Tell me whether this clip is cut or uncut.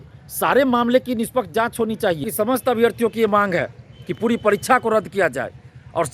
cut